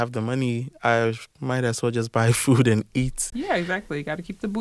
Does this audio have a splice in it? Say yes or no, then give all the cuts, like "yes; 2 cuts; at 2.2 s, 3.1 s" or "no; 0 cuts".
yes; 1 cut; at 3.3 s